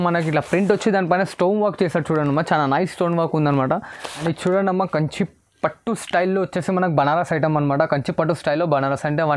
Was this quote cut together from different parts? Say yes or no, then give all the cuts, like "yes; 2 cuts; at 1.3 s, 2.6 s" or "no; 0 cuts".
yes; 1 cut; at 4.1 s